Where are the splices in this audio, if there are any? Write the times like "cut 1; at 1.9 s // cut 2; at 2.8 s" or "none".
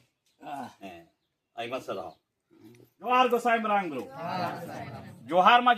cut 1; at 3.1 s